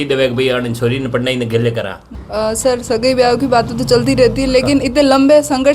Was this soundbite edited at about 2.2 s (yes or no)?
yes